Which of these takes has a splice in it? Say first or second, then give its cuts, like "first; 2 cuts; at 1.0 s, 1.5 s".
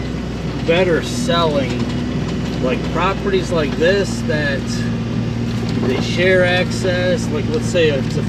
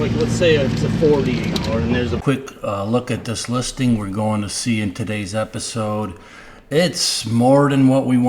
second; 1 cut; at 2.2 s